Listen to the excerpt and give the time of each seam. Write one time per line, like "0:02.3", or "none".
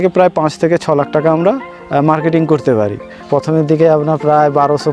0:03.1